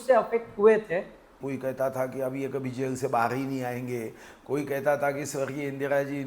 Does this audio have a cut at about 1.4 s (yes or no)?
yes